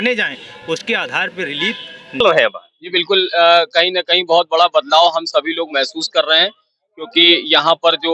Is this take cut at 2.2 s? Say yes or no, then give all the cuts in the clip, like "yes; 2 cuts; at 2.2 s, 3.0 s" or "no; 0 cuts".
yes; 1 cut; at 2.2 s